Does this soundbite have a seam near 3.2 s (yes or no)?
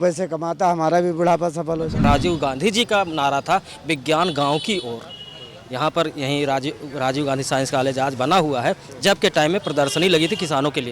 no